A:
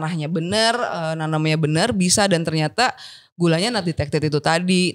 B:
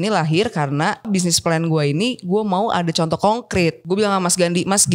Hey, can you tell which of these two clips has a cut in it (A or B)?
B